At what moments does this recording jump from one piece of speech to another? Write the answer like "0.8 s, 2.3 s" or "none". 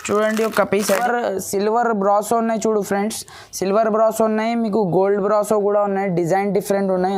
1.0 s